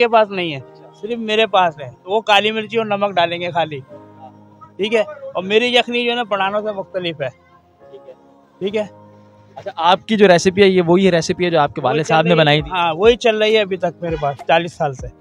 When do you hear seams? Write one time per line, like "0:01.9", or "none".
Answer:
none